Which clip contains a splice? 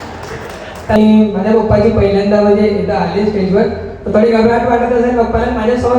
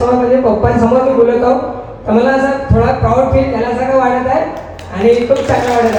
first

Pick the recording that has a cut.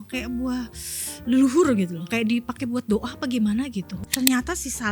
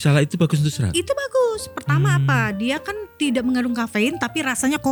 first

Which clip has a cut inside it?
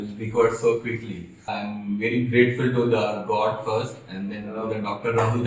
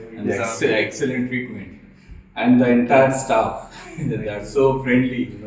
first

